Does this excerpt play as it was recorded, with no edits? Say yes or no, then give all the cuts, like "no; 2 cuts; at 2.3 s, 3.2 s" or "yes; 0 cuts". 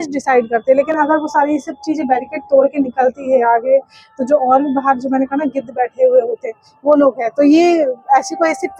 yes; 0 cuts